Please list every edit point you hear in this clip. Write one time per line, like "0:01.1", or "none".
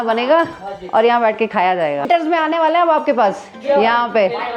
0:02.1